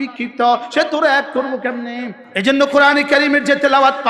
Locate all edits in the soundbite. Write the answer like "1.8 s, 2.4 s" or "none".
2.2 s